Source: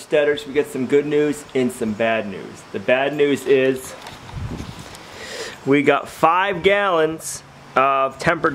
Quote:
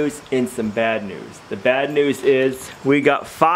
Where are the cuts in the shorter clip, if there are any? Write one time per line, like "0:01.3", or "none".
0:02.7

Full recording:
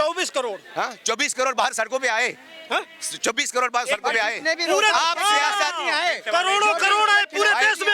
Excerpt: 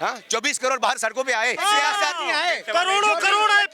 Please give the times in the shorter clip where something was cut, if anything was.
0:01.6

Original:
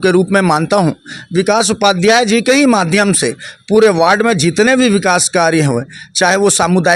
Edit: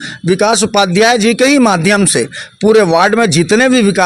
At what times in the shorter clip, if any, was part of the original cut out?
none

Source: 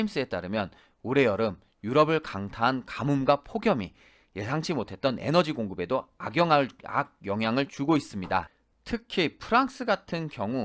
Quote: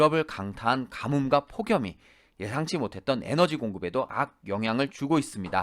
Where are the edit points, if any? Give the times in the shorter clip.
0:04.1

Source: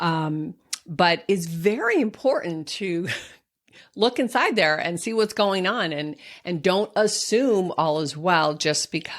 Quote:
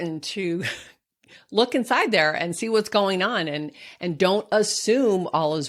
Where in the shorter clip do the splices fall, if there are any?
none

